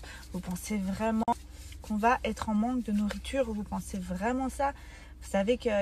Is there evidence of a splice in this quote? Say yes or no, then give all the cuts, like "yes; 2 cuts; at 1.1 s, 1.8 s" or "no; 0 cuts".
yes; 1 cut; at 1.3 s